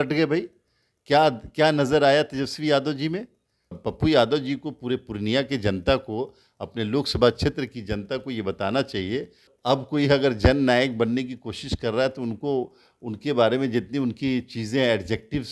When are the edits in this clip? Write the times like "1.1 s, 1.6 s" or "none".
3.8 s, 9.5 s